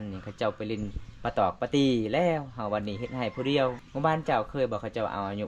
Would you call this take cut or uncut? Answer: cut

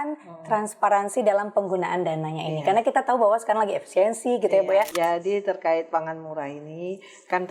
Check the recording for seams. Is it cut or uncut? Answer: cut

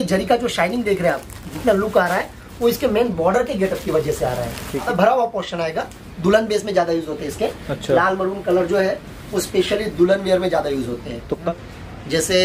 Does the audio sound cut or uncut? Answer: cut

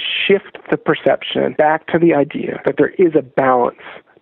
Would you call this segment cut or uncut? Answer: cut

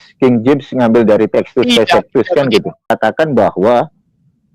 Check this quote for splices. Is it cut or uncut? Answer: cut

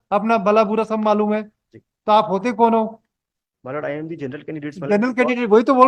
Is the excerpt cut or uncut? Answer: uncut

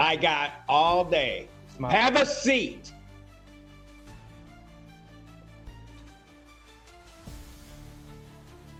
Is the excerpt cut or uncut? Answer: uncut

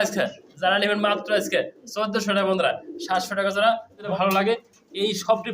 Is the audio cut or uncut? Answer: cut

